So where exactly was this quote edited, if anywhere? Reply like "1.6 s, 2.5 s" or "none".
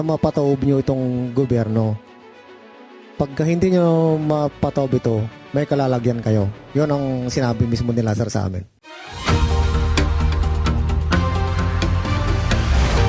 none